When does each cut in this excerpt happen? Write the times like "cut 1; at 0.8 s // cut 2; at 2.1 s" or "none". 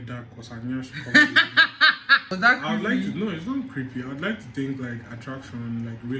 cut 1; at 2.3 s